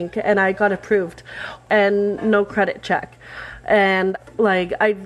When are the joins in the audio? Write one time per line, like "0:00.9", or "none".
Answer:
0:01.7
0:04.2